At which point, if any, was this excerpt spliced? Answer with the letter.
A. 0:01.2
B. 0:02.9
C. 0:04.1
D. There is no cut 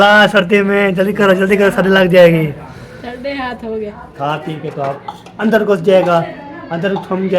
C